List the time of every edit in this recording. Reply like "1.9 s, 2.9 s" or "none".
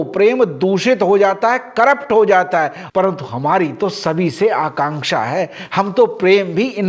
2.8 s